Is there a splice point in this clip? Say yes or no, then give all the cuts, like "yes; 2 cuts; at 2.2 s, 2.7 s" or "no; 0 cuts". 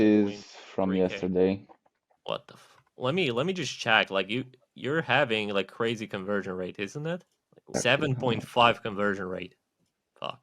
yes; 2 cuts; at 2.1 s, 7.7 s